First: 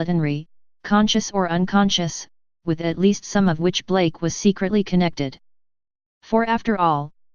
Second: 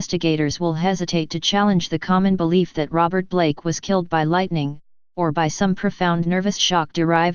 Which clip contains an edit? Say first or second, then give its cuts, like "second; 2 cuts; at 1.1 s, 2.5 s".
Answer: first; 1 cut; at 5.0 s